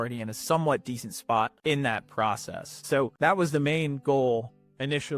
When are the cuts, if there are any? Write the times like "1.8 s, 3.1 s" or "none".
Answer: 1.5 s, 3.1 s